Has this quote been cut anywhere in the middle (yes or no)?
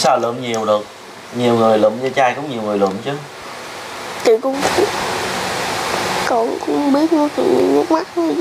yes